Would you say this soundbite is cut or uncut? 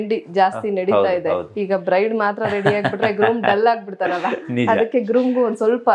uncut